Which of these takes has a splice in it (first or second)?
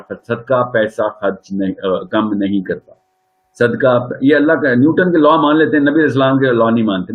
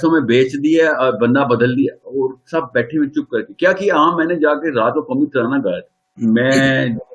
second